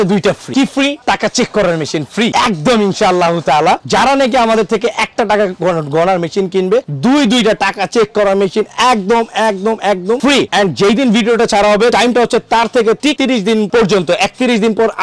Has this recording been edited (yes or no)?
no